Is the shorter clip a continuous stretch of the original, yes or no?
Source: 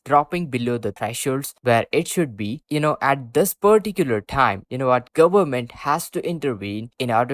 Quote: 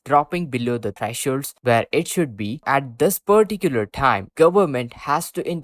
no